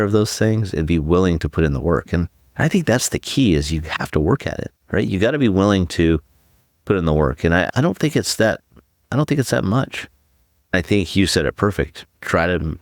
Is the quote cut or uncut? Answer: cut